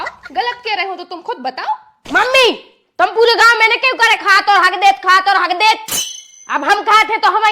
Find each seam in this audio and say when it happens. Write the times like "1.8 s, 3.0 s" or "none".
1.9 s